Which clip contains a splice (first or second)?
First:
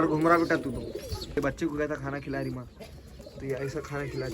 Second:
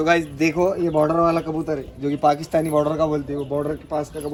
first